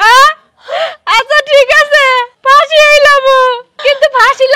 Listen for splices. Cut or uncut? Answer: cut